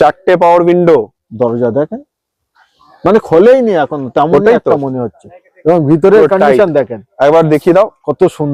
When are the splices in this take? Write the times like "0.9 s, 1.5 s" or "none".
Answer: none